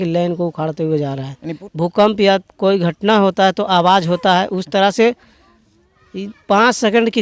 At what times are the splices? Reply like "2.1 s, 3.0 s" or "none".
1.5 s